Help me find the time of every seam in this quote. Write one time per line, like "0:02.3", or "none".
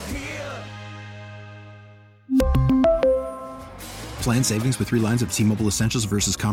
none